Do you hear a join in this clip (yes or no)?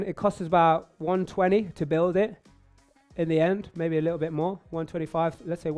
no